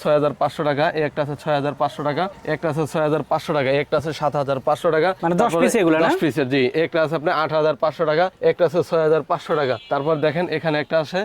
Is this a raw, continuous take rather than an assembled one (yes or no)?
no